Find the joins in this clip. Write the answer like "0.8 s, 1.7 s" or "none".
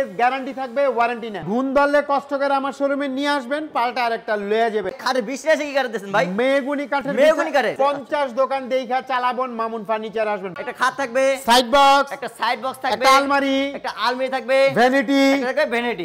1.4 s, 5.0 s, 7.7 s, 10.6 s